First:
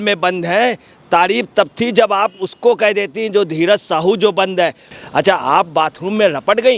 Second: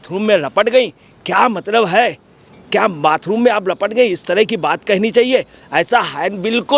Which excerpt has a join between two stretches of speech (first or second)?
first